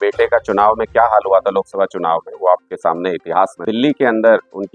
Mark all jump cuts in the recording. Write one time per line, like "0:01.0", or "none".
0:03.6